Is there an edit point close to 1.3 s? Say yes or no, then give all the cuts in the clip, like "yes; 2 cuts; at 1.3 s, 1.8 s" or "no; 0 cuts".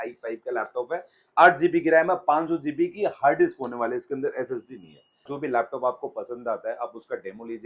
no; 1 cut; at 5.3 s